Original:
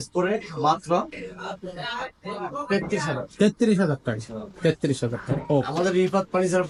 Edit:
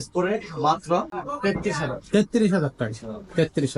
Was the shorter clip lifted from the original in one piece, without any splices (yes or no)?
no